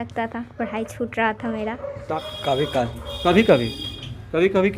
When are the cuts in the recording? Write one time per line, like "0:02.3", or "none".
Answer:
0:02.1